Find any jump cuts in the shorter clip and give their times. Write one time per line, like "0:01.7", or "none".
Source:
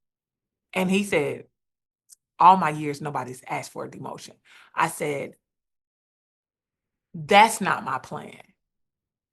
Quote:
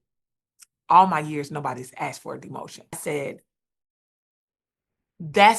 0:03.0